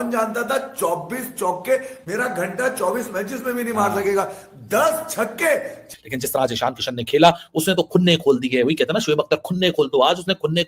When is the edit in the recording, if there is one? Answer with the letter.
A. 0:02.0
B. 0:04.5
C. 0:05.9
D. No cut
C